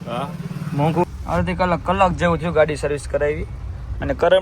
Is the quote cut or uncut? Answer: cut